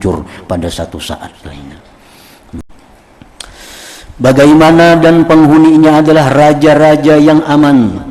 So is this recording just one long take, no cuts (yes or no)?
no